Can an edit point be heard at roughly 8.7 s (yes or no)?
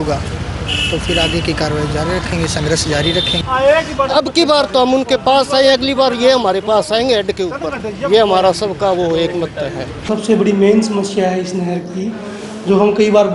no